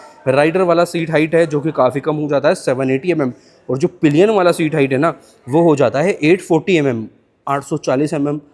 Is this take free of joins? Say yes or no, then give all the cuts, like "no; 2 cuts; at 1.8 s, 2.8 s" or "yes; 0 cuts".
yes; 0 cuts